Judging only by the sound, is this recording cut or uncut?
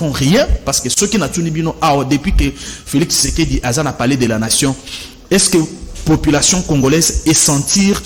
uncut